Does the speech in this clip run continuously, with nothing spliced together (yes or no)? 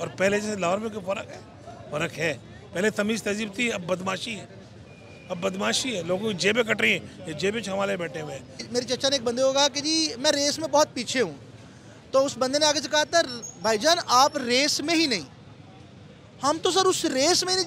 no